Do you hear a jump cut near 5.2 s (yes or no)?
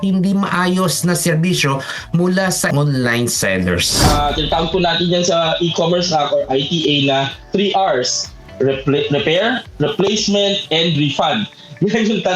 no